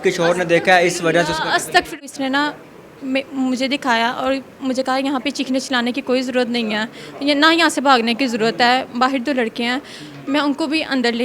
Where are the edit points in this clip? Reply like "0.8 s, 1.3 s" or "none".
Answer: 2.0 s